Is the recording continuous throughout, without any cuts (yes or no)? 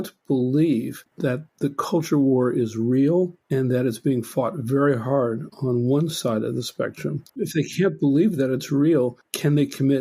yes